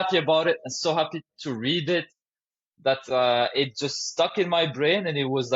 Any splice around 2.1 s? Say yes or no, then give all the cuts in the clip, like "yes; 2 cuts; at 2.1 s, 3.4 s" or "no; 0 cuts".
no; 0 cuts